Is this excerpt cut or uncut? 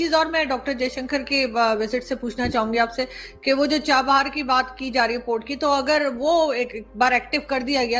uncut